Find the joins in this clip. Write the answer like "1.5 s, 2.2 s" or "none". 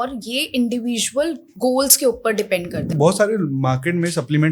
1.5 s, 2.8 s